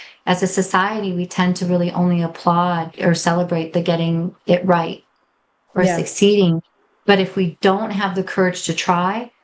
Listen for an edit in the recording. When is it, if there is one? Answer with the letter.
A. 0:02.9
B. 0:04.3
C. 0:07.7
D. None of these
A